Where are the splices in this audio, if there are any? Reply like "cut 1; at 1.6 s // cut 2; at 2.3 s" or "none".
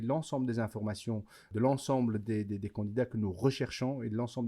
cut 1; at 1.5 s